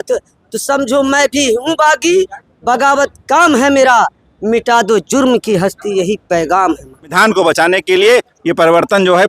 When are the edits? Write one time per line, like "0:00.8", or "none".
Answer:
0:07.2

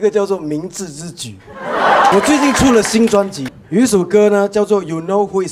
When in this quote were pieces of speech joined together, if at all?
0:02.1
0:03.5

